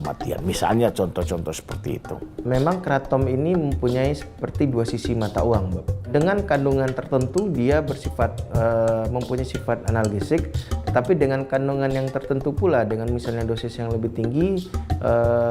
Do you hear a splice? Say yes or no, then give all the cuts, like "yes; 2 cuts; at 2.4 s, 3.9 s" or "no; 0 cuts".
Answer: yes; 1 cut; at 2.3 s